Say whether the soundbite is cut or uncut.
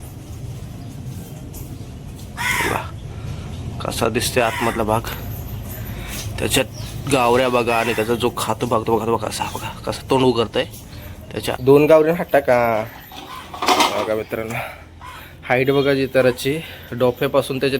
cut